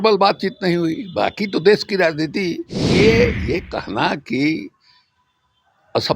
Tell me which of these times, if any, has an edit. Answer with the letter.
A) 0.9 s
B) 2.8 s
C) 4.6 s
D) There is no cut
B